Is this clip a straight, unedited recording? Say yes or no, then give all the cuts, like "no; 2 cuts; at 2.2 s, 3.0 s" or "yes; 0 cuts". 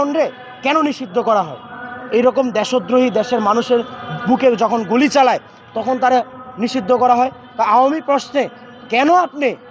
yes; 0 cuts